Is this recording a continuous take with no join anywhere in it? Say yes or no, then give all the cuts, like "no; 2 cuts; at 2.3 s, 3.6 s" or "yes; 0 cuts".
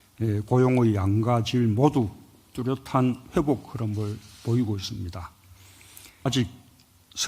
no; 1 cut; at 6.2 s